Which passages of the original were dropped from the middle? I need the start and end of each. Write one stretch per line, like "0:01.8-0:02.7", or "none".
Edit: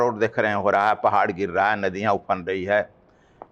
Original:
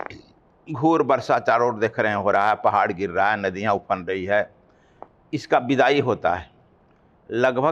none